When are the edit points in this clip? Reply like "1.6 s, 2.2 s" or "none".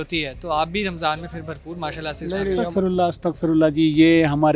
2.6 s